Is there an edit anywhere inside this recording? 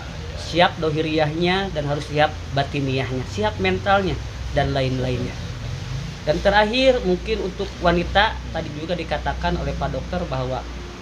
no; 0 cuts

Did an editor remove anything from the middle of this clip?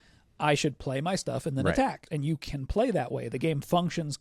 yes; 1 cut; at 2.1 s

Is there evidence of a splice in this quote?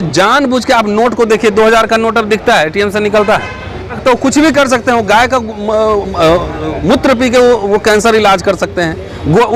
yes; 1 cut; at 4.0 s

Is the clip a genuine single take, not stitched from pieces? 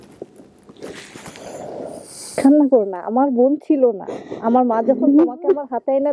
yes; 0 cuts

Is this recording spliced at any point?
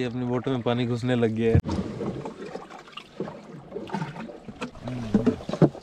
no; 0 cuts

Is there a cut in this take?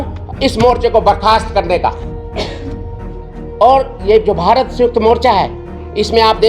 no; 0 cuts

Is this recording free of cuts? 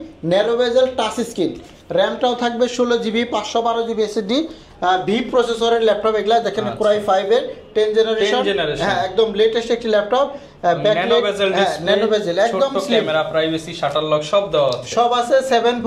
yes; 0 cuts

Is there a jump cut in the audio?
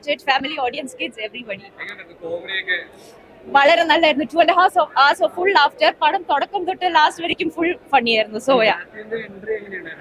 no; 0 cuts

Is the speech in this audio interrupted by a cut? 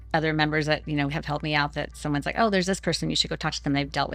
no; 0 cuts

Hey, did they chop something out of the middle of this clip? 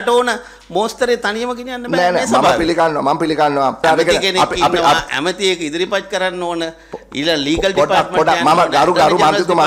yes; 1 cut; at 3.8 s

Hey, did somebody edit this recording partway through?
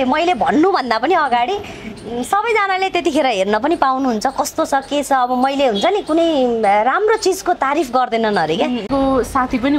yes; 1 cut; at 8.9 s

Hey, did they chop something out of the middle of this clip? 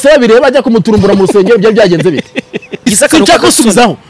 yes; 1 cut; at 2.9 s

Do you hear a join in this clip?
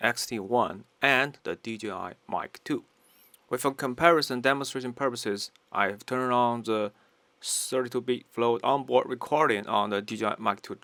no; 0 cuts

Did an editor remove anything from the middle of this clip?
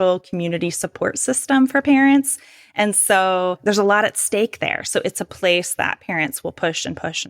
yes; 1 cut; at 3.6 s

